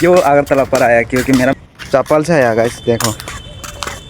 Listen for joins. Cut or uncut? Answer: cut